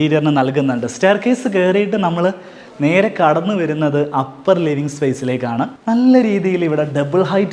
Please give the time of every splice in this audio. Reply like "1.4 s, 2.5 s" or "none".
none